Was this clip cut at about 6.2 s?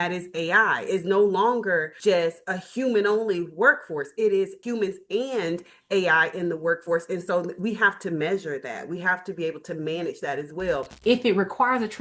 no; 3 cuts; at 1.9 s, 4.6 s, 11.0 s

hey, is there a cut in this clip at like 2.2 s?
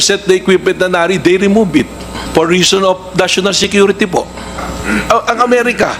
yes; 2 cuts; at 2.2 s, 4.6 s

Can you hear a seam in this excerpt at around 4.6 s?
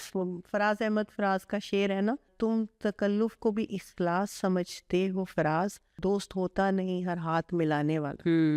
no; 0 cuts

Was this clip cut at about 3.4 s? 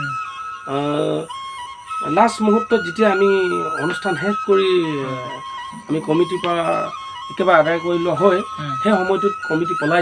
no; 0 cuts

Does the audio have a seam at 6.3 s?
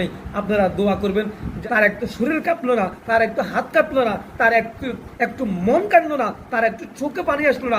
no; 1 cut; at 1.6 s

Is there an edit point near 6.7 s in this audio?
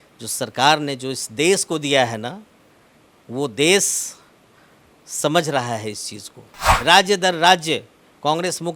yes; 1 cut; at 6.7 s

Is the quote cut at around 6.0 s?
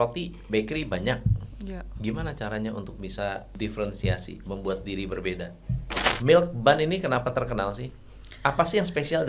yes; 2 cuts; at 3.5 s, 6.0 s

